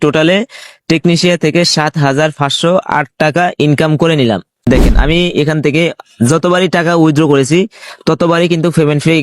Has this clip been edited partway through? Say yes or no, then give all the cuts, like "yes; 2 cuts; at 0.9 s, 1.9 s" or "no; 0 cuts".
yes; 1 cut; at 4.7 s